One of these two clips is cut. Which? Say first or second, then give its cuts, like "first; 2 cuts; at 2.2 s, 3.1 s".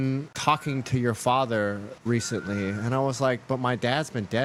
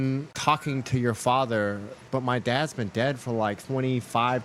second; 2 cuts; at 2.0 s, 3.6 s